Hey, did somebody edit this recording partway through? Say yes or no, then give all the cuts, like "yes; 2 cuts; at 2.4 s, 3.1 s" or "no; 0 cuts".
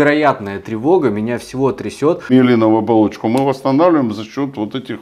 yes; 1 cut; at 2.3 s